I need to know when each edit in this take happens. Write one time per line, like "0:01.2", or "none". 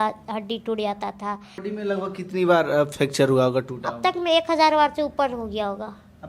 0:01.7